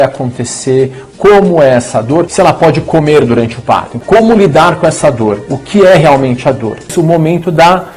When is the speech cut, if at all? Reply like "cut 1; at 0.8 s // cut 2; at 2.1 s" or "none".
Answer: cut 1; at 2.3 s // cut 2; at 4.0 s // cut 3; at 6.9 s